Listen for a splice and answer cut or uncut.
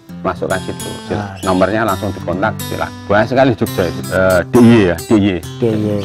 cut